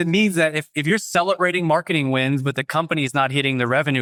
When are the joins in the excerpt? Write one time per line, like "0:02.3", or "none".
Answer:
none